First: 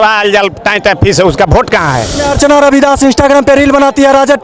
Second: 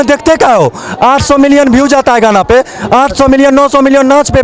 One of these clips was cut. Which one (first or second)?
first